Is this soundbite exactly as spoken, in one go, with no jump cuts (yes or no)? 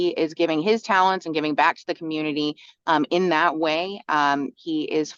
yes